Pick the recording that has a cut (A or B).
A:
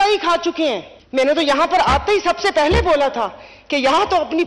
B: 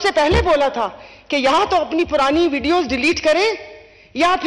A